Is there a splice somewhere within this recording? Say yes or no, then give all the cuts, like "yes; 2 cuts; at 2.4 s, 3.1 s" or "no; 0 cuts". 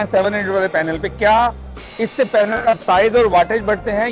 no; 0 cuts